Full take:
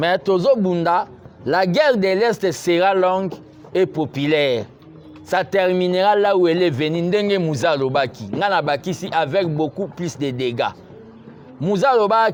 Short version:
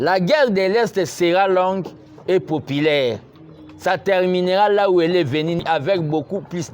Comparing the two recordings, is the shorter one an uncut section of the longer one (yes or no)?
no